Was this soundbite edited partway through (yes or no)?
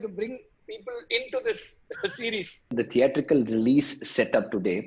yes